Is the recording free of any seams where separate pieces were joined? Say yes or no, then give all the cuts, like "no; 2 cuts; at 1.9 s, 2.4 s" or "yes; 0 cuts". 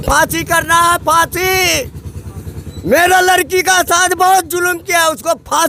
yes; 0 cuts